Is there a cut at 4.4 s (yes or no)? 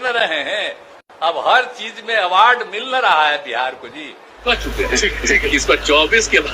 yes